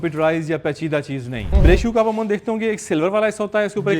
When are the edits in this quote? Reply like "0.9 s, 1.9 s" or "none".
1.4 s